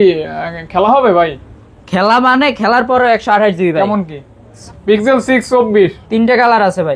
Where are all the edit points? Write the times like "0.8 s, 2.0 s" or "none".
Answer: 4.7 s